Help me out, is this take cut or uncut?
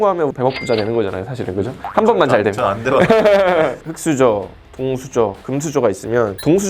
cut